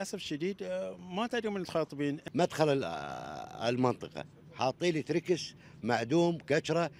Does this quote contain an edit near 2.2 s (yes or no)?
yes